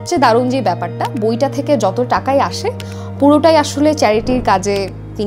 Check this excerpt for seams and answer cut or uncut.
uncut